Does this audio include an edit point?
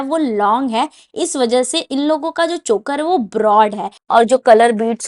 yes; 1 cut; at 3.9 s

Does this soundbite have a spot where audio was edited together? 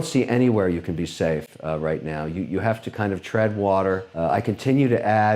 no; 0 cuts

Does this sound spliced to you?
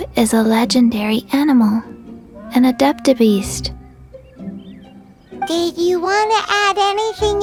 no; 0 cuts

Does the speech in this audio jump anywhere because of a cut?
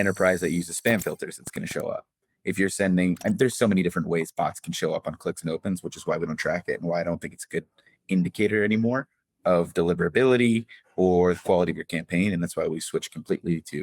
no; 0 cuts

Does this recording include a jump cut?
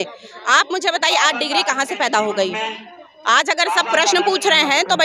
no; 0 cuts

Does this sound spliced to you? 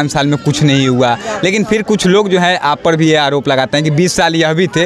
no; 0 cuts

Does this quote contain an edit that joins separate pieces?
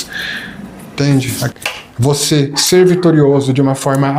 yes; 1 cut; at 1.5 s

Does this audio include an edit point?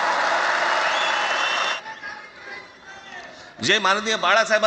yes; 1 cut; at 1.8 s

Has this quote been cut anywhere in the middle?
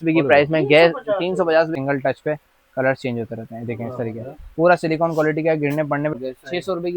yes; 2 cuts; at 1.7 s, 6.1 s

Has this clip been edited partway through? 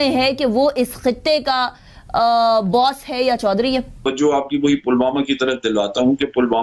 yes; 1 cut; at 4.0 s

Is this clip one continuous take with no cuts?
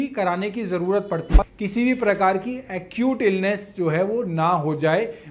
no; 1 cut; at 1.4 s

